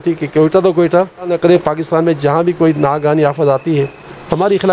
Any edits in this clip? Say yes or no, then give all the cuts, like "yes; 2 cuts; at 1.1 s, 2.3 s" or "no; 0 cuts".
yes; 1 cut; at 1.3 s